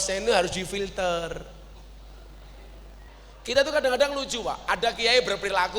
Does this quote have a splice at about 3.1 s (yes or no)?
yes